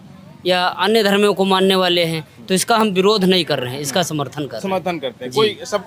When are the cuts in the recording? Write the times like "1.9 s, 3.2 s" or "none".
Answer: none